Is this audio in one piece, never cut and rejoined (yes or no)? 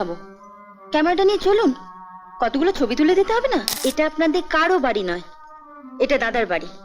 no